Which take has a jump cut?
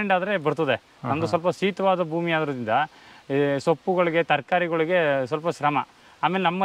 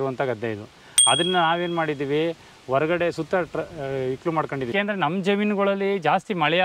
second; 1 cut; at 4.7 s

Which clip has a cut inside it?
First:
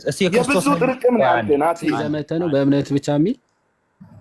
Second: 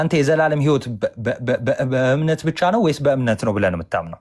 first; 1 cut; at 2.1 s

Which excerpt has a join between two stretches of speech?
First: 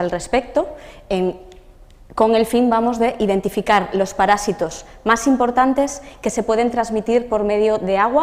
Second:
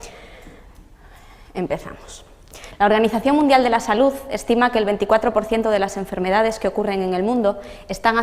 second; 1 cut; at 5.5 s

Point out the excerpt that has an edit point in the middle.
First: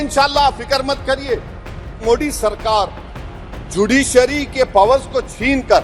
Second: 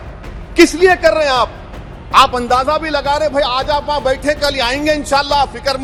first; 1 cut; at 2.0 s

